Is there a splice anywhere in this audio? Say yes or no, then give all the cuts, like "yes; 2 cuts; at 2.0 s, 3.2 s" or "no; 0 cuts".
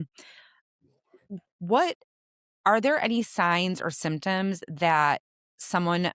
no; 0 cuts